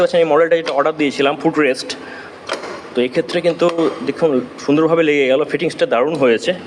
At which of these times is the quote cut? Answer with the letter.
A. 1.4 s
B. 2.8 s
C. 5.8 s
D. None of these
D